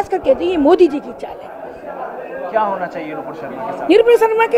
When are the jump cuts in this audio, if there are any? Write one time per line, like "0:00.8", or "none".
none